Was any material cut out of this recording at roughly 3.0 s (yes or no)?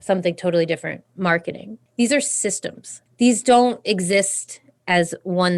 yes